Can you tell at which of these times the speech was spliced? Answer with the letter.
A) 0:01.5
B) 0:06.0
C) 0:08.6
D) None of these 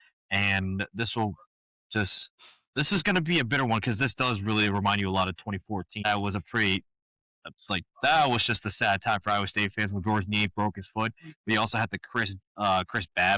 B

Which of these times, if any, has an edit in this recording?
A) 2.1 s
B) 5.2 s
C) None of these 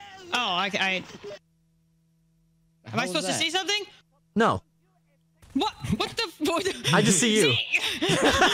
C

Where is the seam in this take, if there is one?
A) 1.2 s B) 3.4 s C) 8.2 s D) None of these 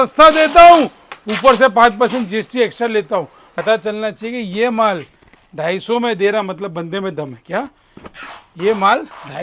B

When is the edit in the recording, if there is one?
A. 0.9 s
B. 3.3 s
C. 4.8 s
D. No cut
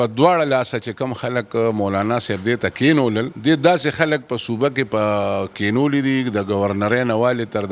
B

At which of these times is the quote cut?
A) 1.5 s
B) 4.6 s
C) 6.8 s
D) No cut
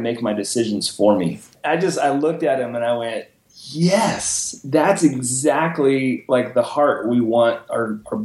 A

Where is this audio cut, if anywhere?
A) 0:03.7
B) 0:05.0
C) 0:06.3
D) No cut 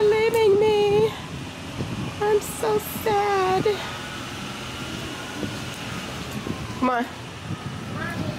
D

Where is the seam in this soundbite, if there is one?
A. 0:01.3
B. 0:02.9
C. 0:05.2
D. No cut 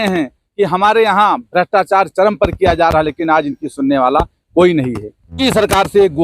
D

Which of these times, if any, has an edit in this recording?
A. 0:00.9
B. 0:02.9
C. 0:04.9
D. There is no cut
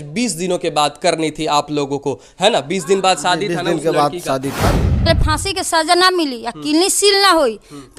C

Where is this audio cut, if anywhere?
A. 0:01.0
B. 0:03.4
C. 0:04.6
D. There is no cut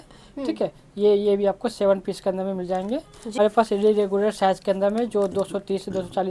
B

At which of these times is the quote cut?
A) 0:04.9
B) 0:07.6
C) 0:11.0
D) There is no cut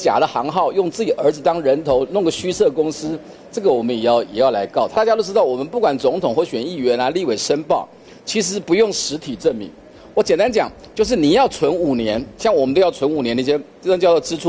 A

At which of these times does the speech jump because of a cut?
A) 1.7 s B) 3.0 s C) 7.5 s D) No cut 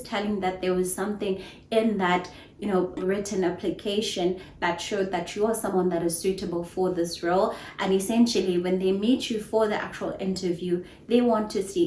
B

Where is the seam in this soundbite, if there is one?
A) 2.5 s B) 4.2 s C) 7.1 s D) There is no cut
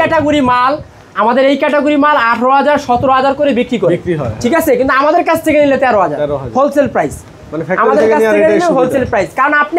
D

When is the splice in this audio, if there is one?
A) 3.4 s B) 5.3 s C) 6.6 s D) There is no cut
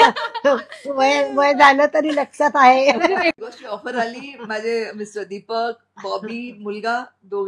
A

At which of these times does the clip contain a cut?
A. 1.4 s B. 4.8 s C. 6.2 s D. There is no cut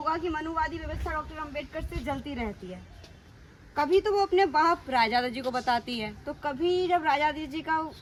D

